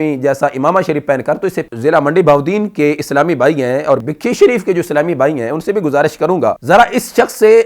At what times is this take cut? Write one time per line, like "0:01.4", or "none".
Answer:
0:01.6
0:04.0
0:06.6